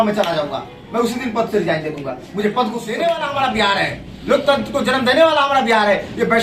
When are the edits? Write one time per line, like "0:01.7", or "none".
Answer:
0:02.9